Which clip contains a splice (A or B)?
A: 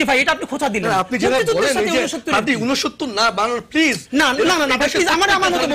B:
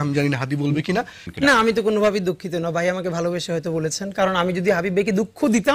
B